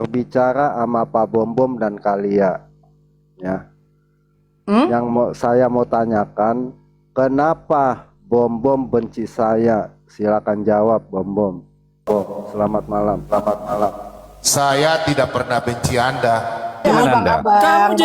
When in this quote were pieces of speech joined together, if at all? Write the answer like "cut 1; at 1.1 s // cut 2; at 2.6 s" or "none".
cut 1; at 16.7 s